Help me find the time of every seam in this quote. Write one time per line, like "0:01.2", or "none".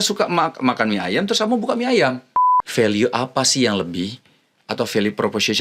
0:02.6